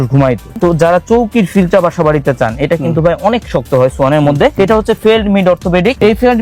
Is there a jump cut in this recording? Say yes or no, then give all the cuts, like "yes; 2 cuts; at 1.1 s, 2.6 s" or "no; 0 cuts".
no; 0 cuts